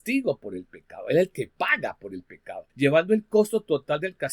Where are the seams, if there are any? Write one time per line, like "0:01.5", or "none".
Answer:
0:02.6